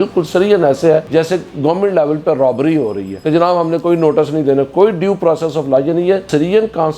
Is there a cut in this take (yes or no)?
no